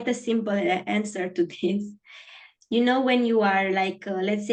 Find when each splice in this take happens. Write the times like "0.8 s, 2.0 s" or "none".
none